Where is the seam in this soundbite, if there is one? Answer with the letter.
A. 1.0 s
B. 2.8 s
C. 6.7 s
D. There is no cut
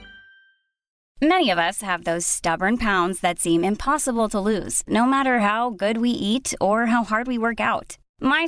A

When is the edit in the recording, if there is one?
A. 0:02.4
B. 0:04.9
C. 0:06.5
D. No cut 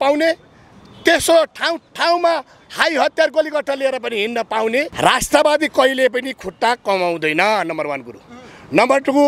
B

